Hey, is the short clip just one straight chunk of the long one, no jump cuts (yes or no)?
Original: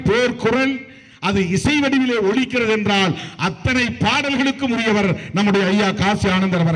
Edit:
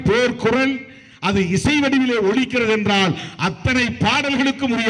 yes